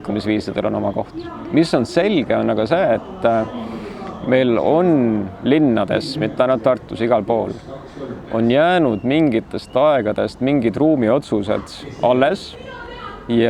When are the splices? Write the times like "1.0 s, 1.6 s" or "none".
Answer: none